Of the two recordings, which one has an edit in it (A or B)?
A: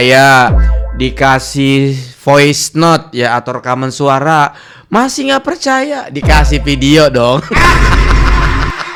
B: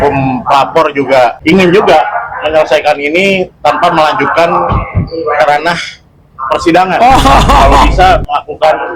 B